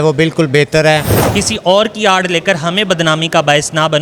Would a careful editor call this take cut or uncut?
cut